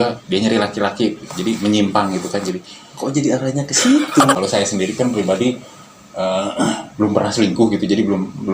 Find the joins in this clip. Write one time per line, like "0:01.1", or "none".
0:04.3